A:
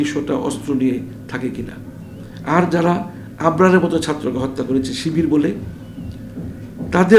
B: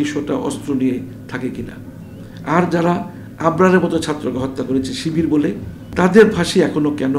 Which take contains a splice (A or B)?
B